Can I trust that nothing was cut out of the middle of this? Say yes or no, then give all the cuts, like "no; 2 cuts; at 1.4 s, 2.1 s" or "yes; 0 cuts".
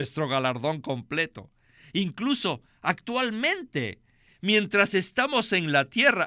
no; 1 cut; at 1.7 s